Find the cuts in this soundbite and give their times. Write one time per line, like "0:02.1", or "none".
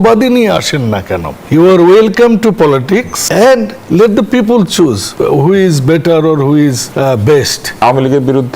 0:01.3
0:03.2
0:05.1
0:06.8
0:07.8

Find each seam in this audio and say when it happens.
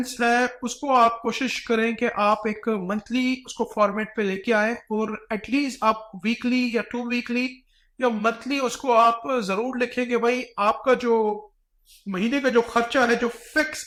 none

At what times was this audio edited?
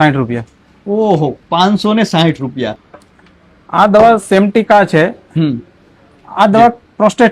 0:02.8

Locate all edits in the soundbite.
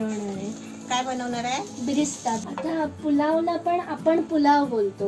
0:02.5

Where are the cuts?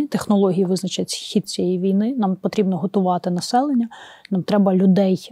none

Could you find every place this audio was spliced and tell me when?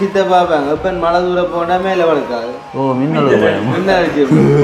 none

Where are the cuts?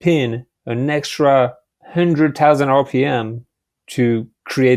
none

